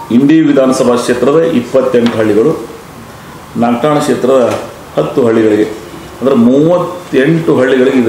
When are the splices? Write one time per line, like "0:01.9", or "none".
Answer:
none